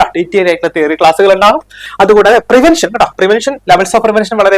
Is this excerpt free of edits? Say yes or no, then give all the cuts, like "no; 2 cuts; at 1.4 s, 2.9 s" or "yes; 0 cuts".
no; 1 cut; at 1.8 s